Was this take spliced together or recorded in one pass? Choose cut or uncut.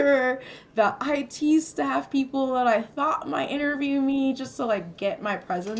uncut